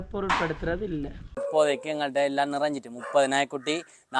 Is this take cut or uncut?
cut